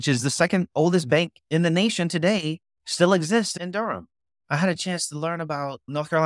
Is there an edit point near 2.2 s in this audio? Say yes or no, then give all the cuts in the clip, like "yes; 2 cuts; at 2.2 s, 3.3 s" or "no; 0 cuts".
no; 1 cut; at 3.5 s